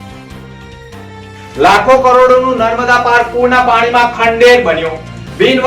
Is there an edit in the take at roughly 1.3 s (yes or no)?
no